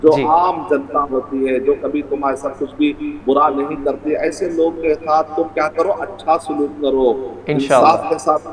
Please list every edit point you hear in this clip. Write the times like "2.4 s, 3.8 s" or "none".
none

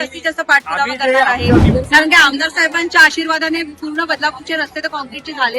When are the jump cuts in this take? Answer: 1.6 s

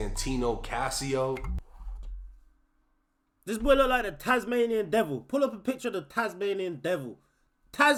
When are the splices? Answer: none

